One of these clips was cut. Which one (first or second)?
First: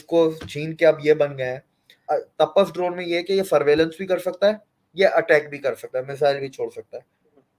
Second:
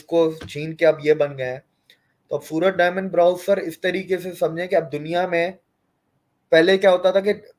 first